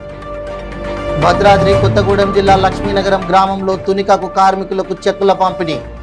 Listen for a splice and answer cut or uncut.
cut